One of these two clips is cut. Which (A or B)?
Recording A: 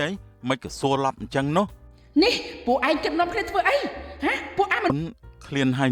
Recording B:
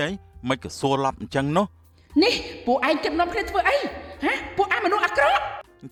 A